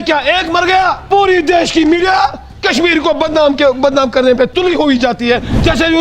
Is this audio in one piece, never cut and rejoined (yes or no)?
no